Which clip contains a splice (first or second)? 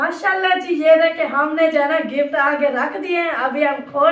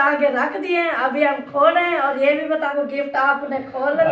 second